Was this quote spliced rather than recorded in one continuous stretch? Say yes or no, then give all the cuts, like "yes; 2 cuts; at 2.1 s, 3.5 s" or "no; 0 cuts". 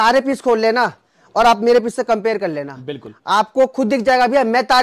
no; 0 cuts